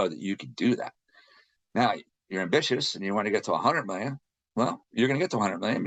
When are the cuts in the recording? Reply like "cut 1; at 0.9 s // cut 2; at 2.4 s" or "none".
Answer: none